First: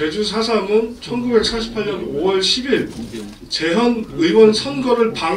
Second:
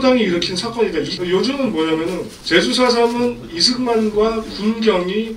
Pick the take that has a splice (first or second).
second